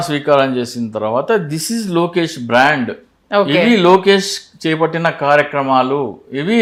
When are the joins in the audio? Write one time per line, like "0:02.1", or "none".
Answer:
none